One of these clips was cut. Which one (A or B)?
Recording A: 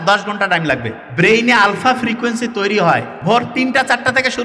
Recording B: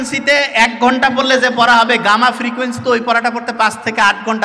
A